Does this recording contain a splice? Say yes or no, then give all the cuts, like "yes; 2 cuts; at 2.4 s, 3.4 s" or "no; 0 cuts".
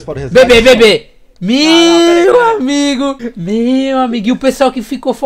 no; 0 cuts